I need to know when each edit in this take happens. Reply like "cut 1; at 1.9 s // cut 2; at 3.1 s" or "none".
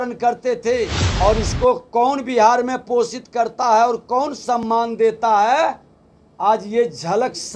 cut 1; at 1.0 s